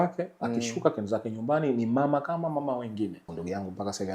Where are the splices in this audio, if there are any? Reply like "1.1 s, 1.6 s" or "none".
3.2 s

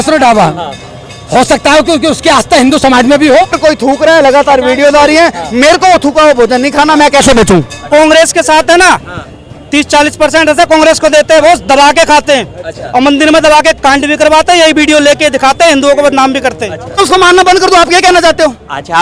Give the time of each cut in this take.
3.6 s, 7.9 s, 17.0 s

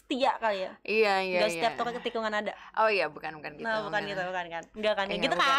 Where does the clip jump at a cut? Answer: none

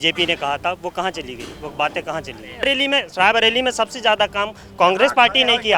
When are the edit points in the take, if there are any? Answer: 2.6 s

